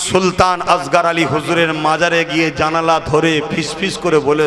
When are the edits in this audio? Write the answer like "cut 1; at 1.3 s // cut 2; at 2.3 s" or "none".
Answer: none